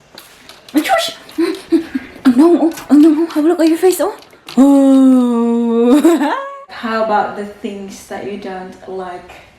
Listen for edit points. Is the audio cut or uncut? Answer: cut